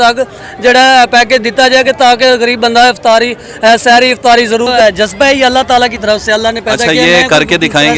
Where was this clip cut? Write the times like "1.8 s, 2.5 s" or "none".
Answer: 4.7 s